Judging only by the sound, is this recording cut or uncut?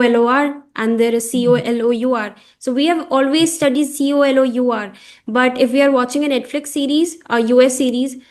uncut